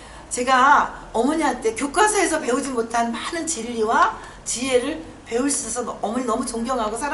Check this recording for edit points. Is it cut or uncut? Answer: uncut